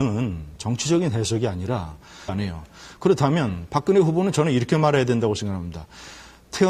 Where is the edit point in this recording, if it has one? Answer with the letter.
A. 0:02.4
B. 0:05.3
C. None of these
C